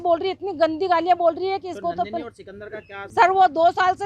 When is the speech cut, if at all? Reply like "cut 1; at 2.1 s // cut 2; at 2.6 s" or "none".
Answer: cut 1; at 3.0 s